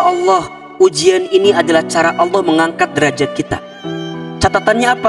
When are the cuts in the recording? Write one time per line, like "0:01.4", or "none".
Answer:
none